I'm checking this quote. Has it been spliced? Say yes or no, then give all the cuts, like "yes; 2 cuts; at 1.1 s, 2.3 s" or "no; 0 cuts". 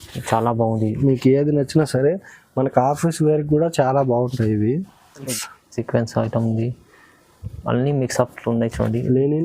yes; 1 cut; at 5.3 s